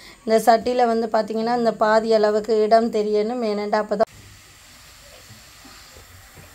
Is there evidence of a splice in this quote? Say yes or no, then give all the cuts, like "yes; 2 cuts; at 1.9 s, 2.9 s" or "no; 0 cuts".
yes; 1 cut; at 4.0 s